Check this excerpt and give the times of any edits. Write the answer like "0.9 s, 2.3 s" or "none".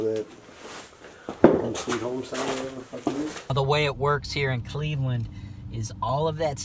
3.4 s